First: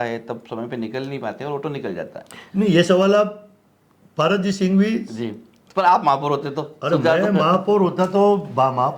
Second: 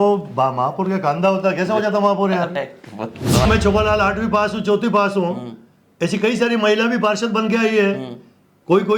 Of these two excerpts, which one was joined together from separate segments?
second; 1 cut; at 3.5 s

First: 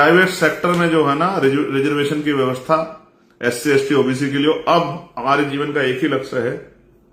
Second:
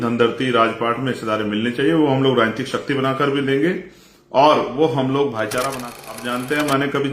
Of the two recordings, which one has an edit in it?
second; 1 cut; at 5.7 s

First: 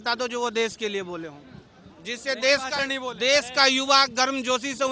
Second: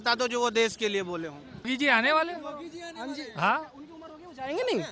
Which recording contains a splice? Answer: second; 1 cut; at 1.7 s

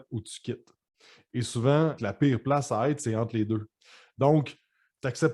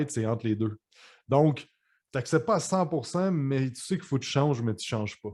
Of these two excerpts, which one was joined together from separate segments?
first; 1 cut; at 2.0 s

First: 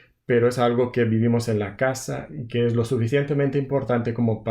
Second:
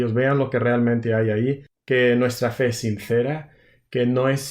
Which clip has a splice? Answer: second; 1 cut; at 1.7 s

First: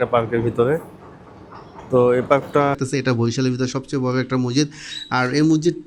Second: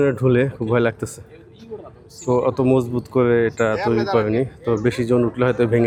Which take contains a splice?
first; 1 cut; at 2.8 s

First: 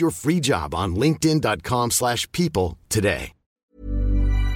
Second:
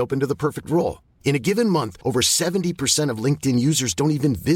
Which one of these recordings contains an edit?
first; 1 cut; at 3.6 s

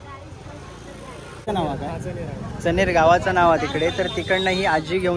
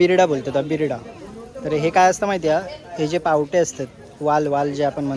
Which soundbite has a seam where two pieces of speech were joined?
first; 1 cut; at 1.4 s

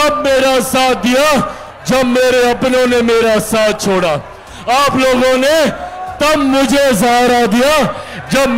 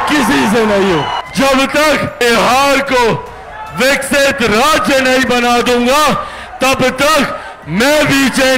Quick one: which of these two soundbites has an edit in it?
second; 2 cuts; at 1.2 s, 2.2 s

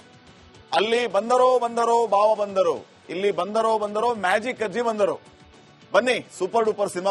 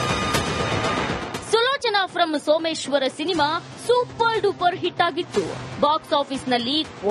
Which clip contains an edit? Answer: second; 1 cut; at 1.0 s

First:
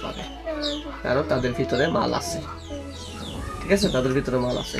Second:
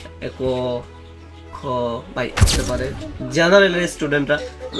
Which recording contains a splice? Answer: second; 1 cut; at 2.4 s

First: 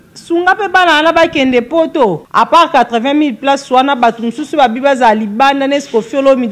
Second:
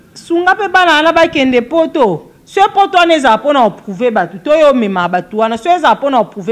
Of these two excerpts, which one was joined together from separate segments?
first; 1 cut; at 2.2 s

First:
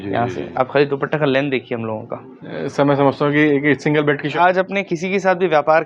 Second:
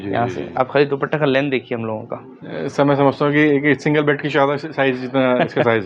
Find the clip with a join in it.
first; 1 cut; at 4.3 s

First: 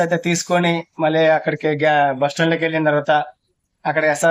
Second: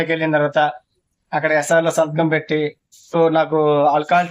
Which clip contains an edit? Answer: second; 1 cut; at 3.1 s

